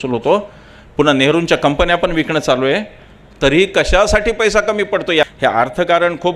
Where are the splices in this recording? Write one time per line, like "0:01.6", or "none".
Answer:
none